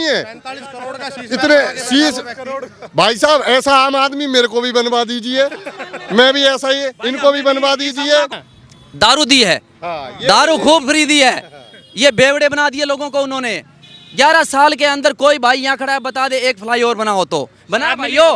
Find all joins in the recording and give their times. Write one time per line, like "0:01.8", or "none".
0:08.5